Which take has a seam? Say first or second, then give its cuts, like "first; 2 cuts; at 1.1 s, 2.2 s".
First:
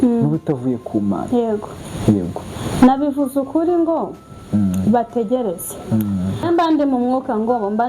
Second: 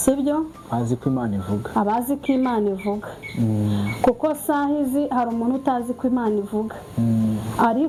first; 1 cut; at 6.4 s